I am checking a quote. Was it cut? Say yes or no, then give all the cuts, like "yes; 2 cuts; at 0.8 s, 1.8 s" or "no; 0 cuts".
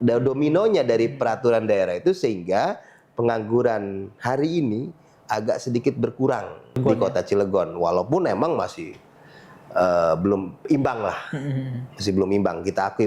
yes; 1 cut; at 6.8 s